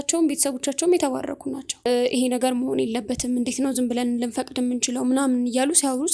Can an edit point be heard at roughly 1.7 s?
yes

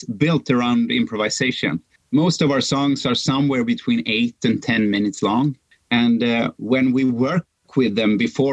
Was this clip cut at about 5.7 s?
yes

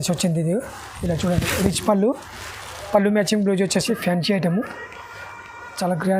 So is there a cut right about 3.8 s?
yes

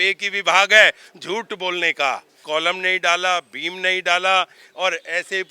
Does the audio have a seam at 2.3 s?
yes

